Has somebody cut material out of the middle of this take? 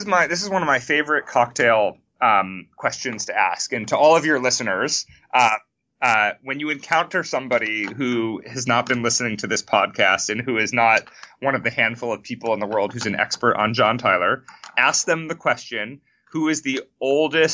no; 0 cuts

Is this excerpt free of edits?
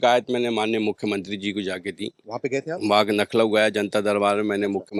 yes; 0 cuts

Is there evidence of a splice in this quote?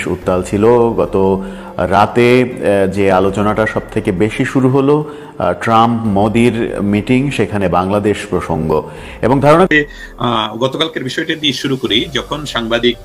yes; 1 cut; at 9.7 s

